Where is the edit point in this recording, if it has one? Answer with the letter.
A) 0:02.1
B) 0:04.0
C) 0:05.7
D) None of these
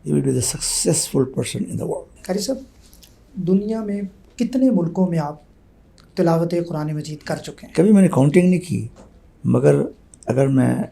A